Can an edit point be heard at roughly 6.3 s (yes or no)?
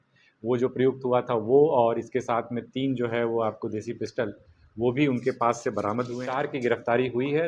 yes